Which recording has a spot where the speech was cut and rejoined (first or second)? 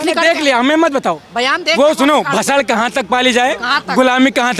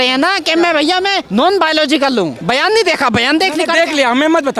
second